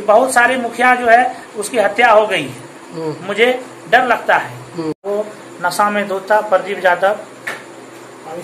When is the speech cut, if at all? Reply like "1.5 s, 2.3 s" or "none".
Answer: 5.1 s

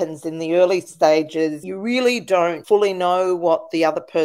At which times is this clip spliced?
1.7 s, 2.6 s

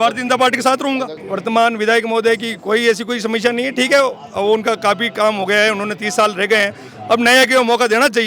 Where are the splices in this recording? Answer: 1.1 s

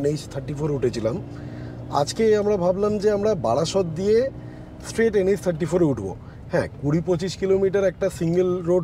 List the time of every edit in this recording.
none

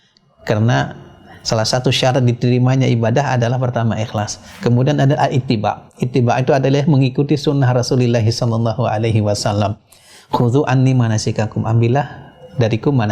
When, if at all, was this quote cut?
none

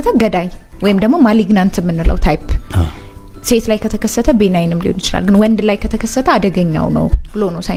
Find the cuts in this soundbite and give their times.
none

